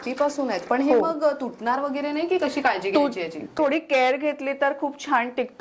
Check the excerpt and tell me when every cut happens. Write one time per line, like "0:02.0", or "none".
0:03.5